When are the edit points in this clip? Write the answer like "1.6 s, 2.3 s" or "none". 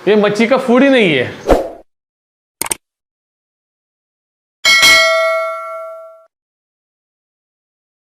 none